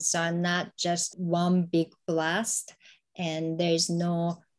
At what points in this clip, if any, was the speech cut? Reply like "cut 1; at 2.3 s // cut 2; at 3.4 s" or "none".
cut 1; at 1.1 s